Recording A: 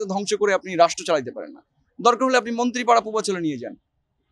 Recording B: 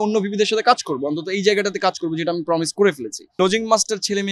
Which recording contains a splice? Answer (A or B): B